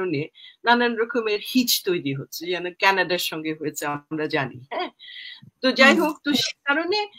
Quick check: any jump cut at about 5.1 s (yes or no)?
no